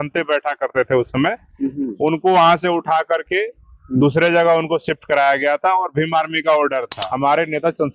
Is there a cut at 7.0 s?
yes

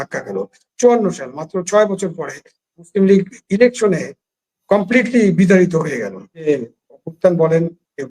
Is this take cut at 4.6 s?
no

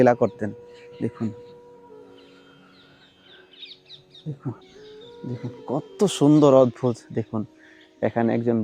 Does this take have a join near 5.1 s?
yes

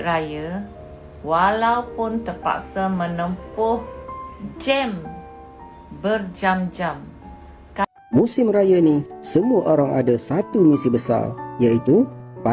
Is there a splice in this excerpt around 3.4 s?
no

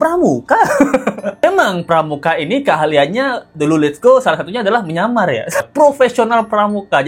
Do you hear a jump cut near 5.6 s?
yes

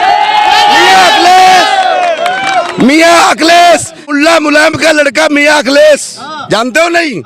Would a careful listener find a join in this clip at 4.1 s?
yes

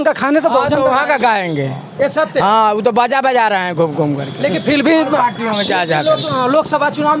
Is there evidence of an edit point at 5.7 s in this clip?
no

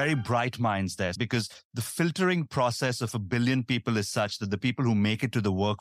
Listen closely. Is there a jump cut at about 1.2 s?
yes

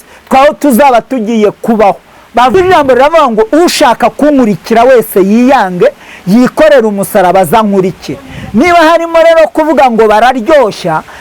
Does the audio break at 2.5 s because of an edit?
yes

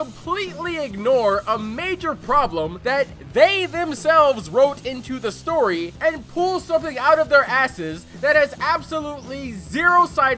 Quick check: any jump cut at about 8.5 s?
no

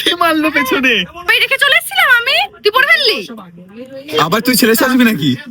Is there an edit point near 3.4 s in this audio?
no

